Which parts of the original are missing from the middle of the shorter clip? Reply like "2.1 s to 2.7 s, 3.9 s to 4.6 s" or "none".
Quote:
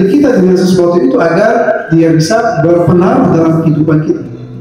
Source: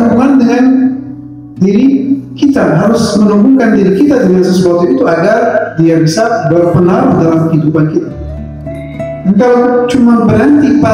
none